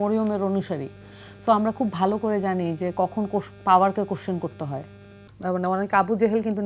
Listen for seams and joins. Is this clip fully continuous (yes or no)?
no